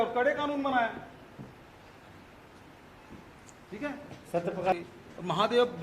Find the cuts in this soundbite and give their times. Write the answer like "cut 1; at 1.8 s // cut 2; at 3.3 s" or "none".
cut 1; at 4.7 s